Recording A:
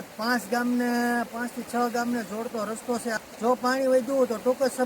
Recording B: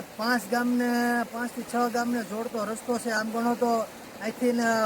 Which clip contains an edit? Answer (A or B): A